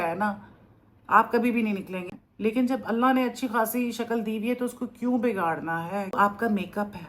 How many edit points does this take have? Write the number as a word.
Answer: two